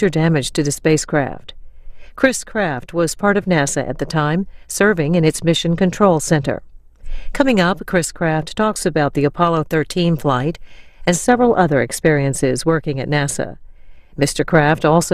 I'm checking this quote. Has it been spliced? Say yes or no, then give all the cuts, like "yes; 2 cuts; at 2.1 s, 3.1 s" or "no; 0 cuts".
no; 0 cuts